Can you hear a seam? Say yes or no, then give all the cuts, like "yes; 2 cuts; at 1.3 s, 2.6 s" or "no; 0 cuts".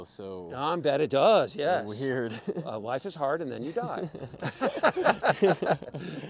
no; 0 cuts